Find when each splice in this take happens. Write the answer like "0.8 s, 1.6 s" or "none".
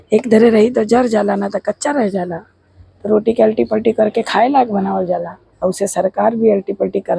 none